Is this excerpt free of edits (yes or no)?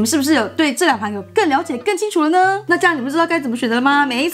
yes